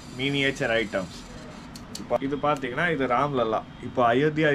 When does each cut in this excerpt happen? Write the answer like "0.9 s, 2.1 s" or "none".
2.2 s